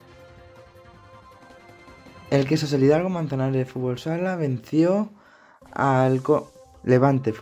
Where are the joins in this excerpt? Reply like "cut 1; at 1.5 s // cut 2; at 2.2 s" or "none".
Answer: cut 1; at 1.0 s